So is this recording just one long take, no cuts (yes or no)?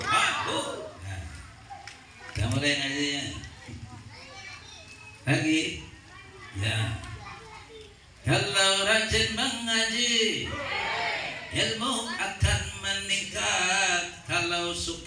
yes